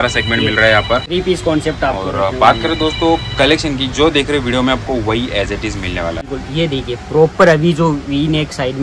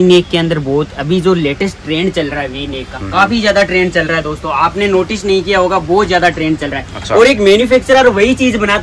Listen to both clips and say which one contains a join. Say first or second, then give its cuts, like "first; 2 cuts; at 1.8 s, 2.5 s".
first; 2 cuts; at 1.1 s, 6.4 s